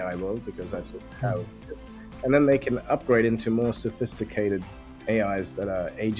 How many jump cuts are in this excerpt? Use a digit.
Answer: 0